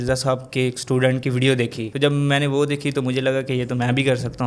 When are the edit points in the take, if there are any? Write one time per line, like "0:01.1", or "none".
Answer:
0:01.8